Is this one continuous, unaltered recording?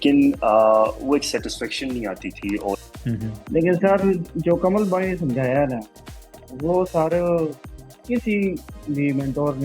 no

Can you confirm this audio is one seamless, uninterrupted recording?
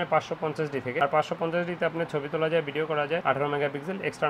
yes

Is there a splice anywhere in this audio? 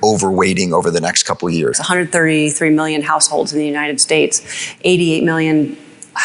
yes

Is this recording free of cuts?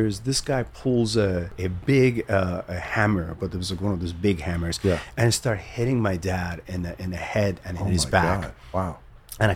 no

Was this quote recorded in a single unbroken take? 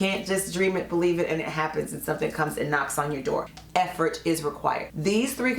no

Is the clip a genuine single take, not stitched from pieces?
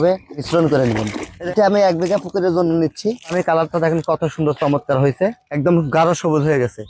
no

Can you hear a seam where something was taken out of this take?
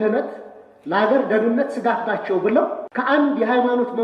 yes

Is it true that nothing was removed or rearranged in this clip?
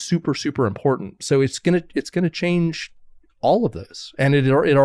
yes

